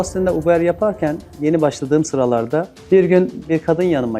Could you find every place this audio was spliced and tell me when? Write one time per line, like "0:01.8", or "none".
none

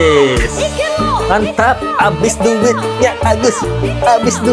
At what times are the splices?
none

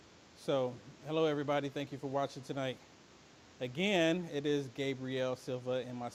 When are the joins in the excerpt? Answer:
none

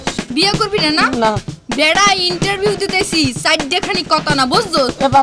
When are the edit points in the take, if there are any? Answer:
none

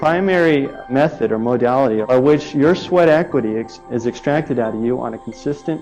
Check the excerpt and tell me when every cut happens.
0:00.8
0:02.0

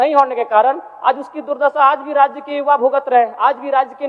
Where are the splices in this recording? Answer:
none

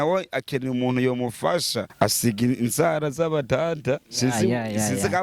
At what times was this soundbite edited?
0:01.8

